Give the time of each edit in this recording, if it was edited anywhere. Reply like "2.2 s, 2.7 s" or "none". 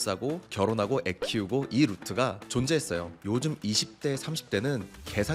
3.1 s